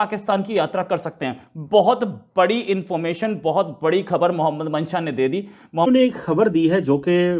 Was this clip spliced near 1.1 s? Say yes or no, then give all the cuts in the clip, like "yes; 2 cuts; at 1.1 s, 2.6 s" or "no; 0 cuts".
no; 1 cut; at 5.9 s